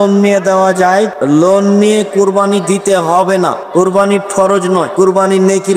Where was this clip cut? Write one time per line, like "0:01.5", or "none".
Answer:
0:01.1
0:03.6
0:04.9